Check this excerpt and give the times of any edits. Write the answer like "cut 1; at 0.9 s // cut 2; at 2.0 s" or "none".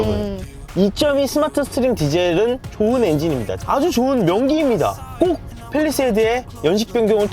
cut 1; at 2.7 s // cut 2; at 3.6 s